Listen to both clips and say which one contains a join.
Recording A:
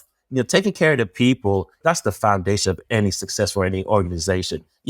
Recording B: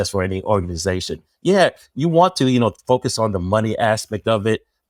A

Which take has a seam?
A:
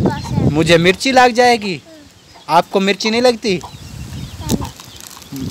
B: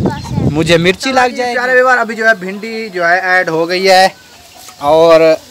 B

